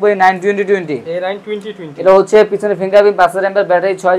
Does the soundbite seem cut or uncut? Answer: uncut